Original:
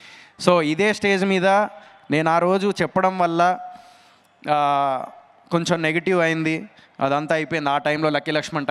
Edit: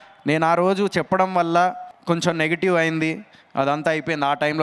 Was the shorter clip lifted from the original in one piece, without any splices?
no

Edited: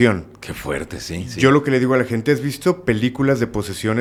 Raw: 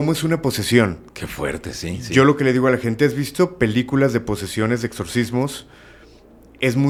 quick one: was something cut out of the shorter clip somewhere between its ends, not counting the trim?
no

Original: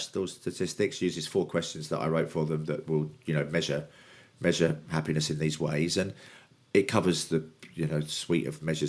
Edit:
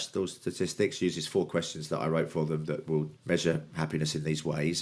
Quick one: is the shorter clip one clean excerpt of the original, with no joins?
no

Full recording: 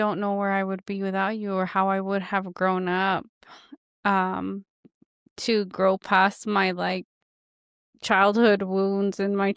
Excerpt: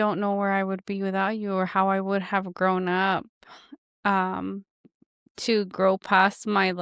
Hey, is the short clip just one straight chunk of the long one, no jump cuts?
yes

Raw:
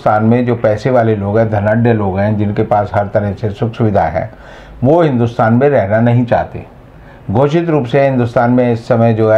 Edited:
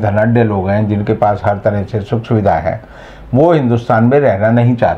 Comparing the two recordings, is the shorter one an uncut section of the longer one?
yes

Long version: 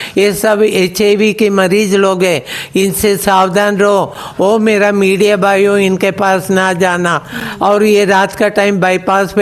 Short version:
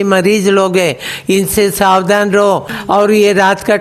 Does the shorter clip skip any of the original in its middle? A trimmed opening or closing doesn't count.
yes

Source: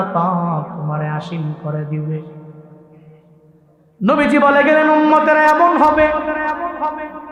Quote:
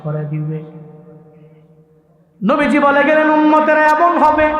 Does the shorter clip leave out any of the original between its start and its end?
no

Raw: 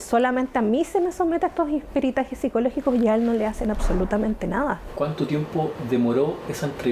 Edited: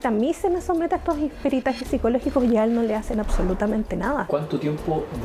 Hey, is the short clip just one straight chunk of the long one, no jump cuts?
no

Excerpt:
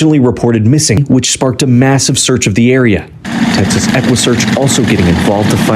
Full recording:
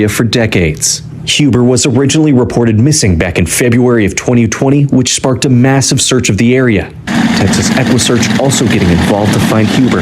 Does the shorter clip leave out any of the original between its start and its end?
yes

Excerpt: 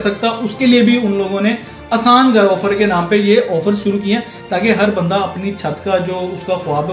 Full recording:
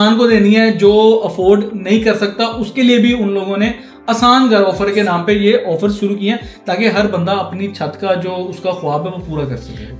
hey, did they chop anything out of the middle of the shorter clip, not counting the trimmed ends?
no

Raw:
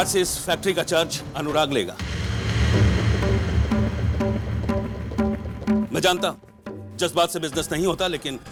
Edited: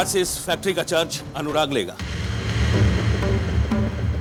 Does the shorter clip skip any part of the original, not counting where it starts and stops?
no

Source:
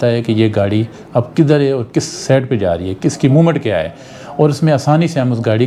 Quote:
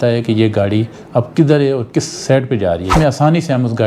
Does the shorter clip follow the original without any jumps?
no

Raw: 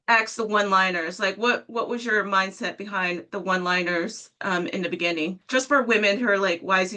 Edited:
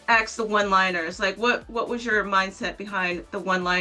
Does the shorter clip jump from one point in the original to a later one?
no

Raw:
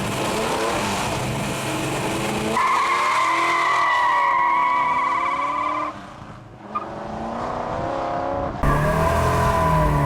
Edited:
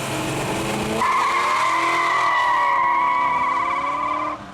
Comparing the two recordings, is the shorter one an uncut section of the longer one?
yes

